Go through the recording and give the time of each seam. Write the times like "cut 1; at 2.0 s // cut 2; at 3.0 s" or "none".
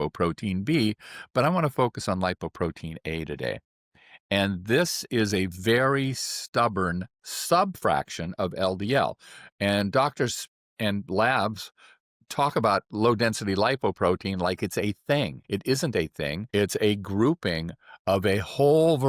cut 1; at 15.4 s // cut 2; at 16.4 s